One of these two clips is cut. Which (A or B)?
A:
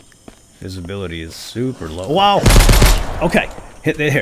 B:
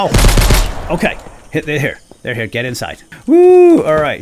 B